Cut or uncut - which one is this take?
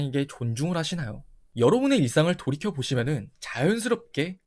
uncut